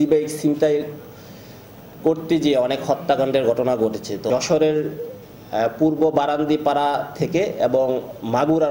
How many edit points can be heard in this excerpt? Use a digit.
1